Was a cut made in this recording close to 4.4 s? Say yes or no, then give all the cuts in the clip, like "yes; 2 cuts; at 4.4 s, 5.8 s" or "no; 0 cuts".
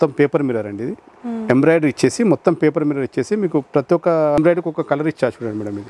yes; 1 cut; at 4.4 s